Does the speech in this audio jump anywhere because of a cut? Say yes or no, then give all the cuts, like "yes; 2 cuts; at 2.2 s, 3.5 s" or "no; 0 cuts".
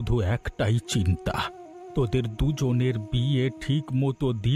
no; 0 cuts